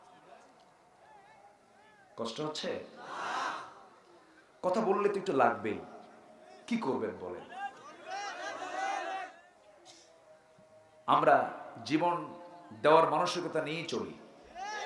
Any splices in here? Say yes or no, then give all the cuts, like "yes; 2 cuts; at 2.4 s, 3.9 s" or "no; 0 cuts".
yes; 1 cut; at 9.4 s